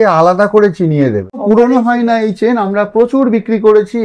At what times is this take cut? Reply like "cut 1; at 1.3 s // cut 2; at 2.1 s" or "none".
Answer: cut 1; at 1.4 s